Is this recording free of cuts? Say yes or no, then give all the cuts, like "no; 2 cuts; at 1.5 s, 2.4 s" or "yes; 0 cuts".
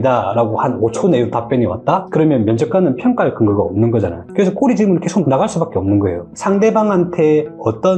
no; 1 cut; at 6.3 s